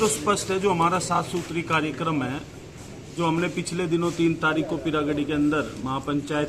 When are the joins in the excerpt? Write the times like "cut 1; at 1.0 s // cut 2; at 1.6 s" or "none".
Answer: none

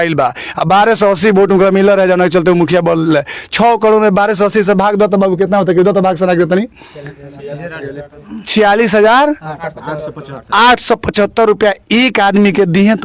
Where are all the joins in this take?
none

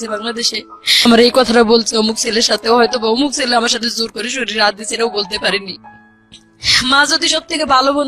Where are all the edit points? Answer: cut 1; at 1.1 s

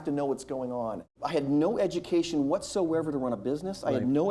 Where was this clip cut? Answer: cut 1; at 1.1 s

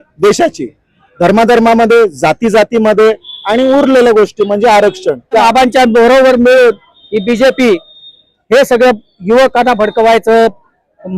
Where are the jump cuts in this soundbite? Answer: cut 1; at 5.4 s

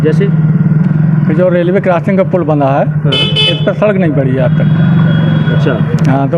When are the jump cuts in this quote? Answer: none

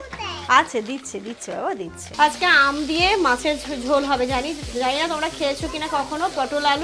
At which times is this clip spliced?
cut 1; at 2.0 s

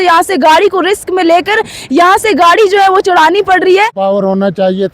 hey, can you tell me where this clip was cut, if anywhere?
cut 1; at 3.9 s

